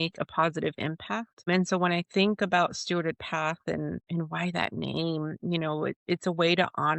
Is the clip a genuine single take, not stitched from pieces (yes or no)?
no